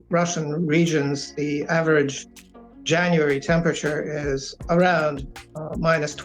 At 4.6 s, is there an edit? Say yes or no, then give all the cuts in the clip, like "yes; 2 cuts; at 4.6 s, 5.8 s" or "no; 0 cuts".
yes; 1 cut; at 4.6 s